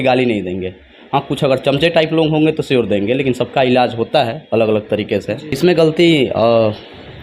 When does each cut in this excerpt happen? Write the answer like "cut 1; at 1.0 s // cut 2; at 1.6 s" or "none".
cut 1; at 5.4 s

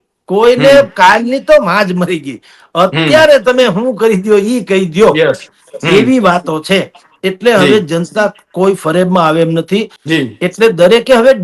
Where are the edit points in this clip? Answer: none

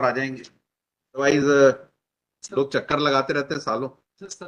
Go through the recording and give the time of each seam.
cut 1; at 1.2 s

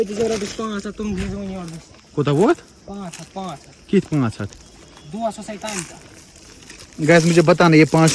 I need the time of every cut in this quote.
none

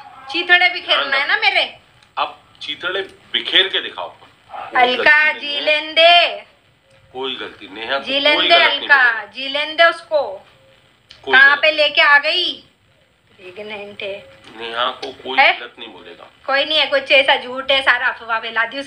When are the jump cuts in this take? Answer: cut 1; at 4.7 s

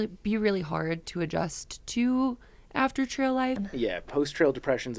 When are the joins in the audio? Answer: cut 1; at 3.6 s

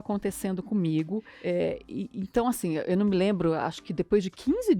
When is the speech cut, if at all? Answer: cut 1; at 1.3 s

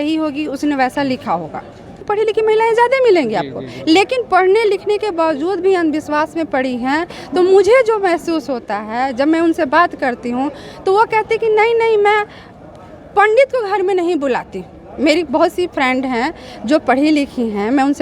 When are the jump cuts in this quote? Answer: cut 1; at 2.0 s

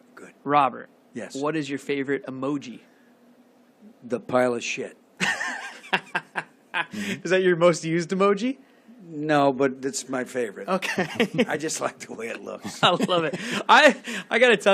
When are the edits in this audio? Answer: cut 1; at 3.2 s

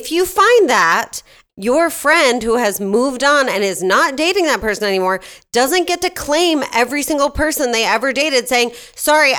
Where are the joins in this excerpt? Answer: cut 1; at 1.5 s

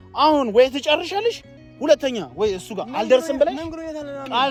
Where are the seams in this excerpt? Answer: none

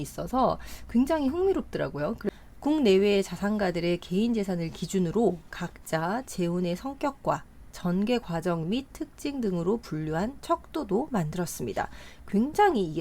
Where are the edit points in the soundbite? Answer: cut 1; at 2.3 s

